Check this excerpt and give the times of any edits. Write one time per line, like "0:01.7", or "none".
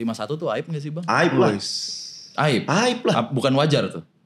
none

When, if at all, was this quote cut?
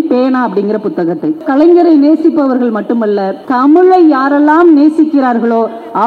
0:01.4
0:03.4

